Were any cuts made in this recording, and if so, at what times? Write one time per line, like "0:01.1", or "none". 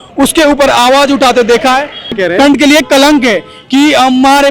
0:02.2